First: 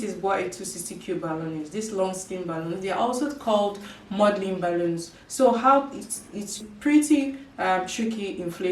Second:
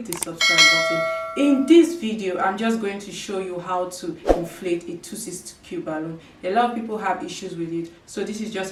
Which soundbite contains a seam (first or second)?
first